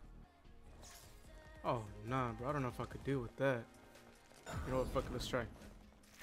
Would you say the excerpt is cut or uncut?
uncut